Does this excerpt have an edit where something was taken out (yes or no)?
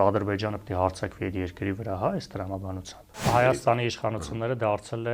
yes